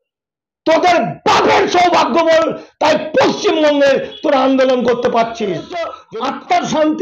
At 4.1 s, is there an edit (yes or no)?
no